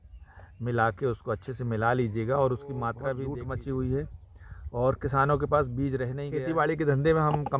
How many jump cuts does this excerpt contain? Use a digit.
2